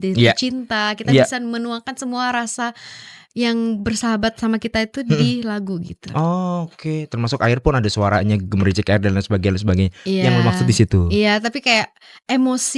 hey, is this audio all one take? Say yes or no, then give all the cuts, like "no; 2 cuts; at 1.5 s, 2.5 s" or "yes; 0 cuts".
yes; 0 cuts